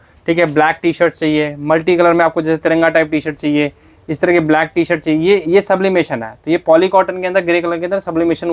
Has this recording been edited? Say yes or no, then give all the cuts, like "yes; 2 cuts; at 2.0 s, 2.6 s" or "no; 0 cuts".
no; 0 cuts